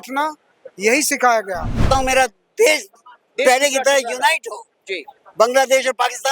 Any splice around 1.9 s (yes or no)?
yes